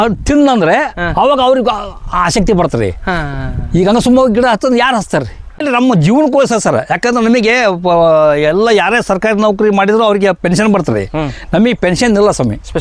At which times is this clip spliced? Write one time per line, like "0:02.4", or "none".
0:05.6